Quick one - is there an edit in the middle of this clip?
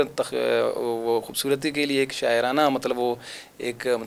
no; 0 cuts

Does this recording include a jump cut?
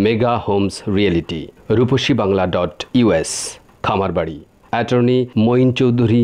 no; 0 cuts

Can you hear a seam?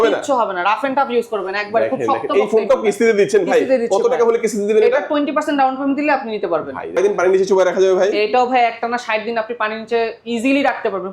yes; 1 cut; at 7.0 s

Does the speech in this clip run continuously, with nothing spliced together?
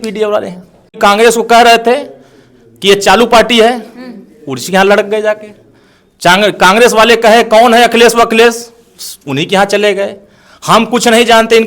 no; 1 cut; at 0.9 s

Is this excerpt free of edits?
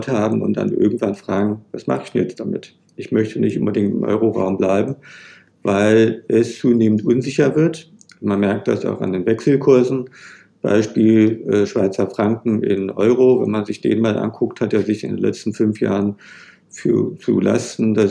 yes; 0 cuts

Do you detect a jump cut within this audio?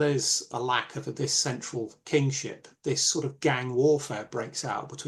no; 0 cuts

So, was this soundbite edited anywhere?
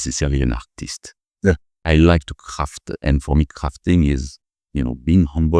yes; 1 cut; at 1.8 s

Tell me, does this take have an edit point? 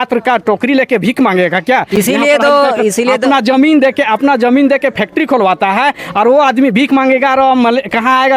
no; 0 cuts

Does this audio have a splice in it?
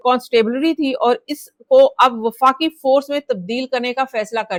no; 0 cuts

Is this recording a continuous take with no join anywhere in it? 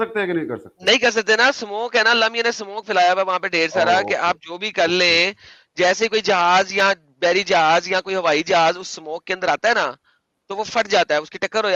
yes; 0 cuts

